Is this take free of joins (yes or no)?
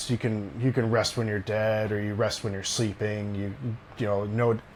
yes